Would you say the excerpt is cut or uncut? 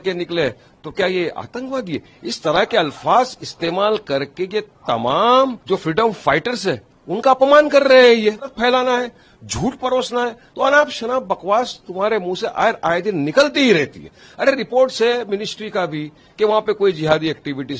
cut